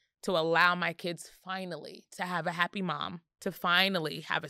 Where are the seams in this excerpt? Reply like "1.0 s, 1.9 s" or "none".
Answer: 3.2 s

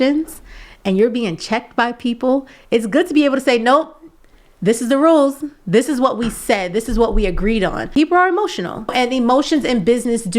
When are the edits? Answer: 7.8 s, 8.9 s

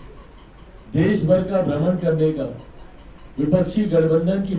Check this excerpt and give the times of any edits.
none

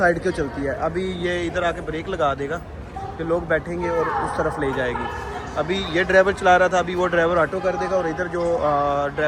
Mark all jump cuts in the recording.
none

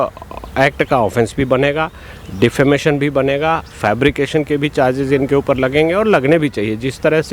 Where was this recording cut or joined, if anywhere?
none

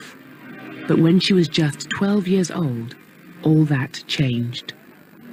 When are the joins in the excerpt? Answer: none

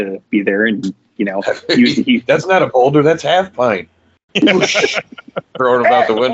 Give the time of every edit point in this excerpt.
none

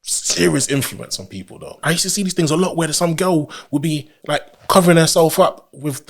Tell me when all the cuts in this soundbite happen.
1.8 s

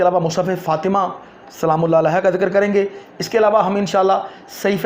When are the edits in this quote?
none

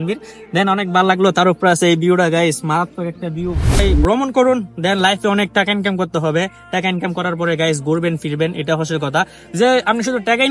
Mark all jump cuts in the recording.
3.8 s

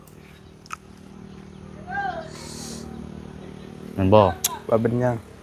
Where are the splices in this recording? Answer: none

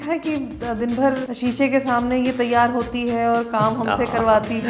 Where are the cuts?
1.3 s

